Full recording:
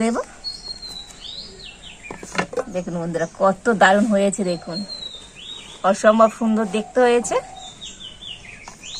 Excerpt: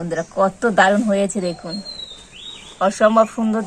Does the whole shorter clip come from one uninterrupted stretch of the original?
yes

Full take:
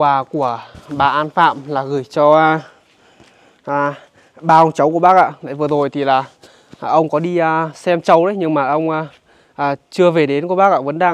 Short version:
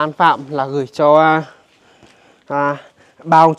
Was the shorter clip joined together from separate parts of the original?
no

